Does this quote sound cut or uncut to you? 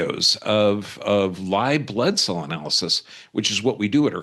uncut